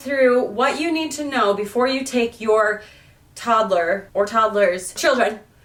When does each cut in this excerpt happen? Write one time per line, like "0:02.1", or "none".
none